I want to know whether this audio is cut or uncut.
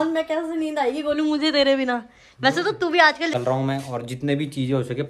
cut